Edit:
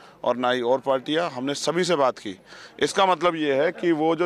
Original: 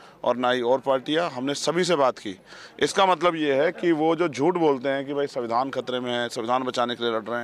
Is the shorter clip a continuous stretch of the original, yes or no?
yes